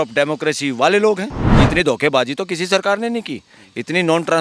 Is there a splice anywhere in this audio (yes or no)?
yes